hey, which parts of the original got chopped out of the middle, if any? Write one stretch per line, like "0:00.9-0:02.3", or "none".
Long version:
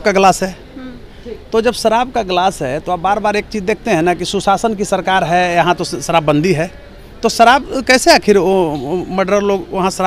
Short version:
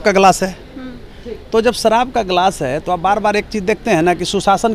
none

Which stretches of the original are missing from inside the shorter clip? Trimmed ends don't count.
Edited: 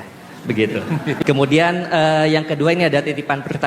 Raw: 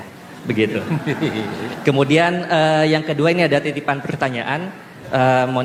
0:01.2-0:01.8

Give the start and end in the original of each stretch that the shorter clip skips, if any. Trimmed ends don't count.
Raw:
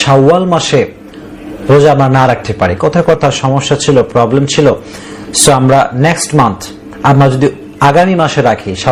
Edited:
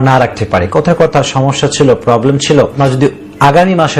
0:04.9-0:07.2

